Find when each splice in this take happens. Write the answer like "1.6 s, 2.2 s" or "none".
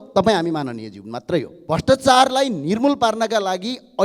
1.6 s